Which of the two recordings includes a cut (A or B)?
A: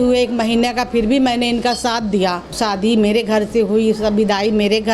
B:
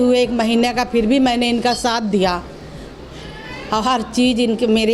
A